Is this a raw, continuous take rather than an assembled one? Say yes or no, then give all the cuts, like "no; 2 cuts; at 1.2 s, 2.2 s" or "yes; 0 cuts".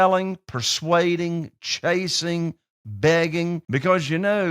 no; 1 cut; at 3.6 s